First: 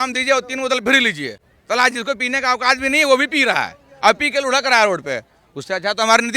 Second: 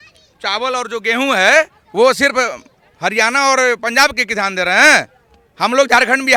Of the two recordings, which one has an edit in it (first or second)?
first